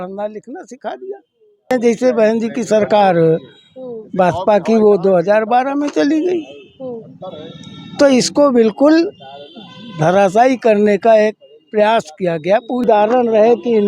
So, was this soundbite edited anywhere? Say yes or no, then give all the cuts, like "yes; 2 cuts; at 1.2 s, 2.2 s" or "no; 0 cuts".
yes; 2 cuts; at 1.7 s, 12.8 s